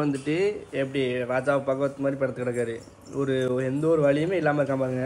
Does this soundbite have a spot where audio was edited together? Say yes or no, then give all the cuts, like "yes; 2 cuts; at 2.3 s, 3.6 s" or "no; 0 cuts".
no; 0 cuts